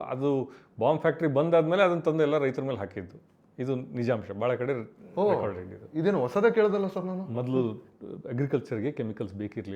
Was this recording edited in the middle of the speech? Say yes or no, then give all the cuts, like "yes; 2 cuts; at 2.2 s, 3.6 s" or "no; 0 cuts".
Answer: no; 0 cuts